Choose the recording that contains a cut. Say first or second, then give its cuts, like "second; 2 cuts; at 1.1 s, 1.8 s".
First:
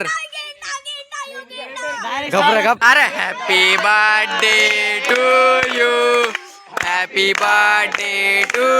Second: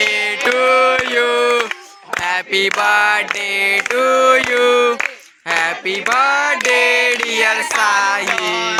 first; 1 cut; at 2.8 s